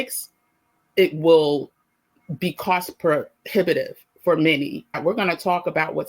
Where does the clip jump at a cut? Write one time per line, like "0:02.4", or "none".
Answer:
0:05.0